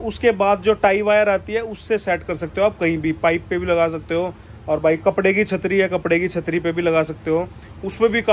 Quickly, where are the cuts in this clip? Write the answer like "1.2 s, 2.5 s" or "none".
none